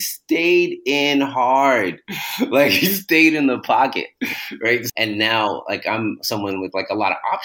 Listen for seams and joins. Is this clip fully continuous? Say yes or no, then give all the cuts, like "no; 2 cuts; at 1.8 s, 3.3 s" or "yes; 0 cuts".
no; 1 cut; at 4.9 s